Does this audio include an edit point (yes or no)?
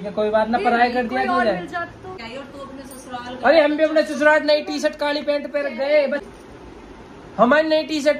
yes